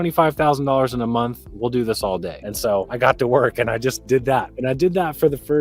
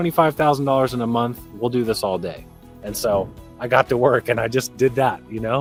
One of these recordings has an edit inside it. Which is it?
first; 2 cuts; at 2.7 s, 4.5 s

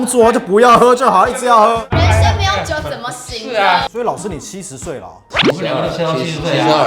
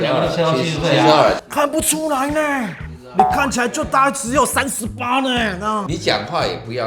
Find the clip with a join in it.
first; 1 cut; at 3.9 s

